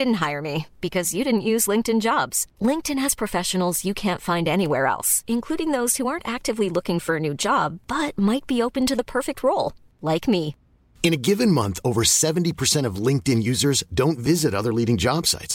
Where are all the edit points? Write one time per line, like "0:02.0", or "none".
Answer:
none